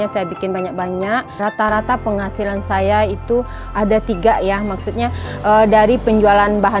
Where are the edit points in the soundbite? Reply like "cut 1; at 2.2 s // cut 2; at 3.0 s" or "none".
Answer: cut 1; at 1.3 s